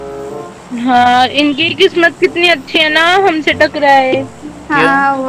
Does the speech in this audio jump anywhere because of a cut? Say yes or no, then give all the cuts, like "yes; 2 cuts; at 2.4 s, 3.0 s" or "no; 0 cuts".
no; 0 cuts